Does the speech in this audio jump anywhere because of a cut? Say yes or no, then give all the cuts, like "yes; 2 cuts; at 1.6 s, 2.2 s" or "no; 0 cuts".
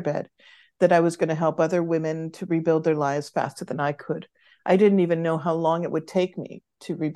no; 0 cuts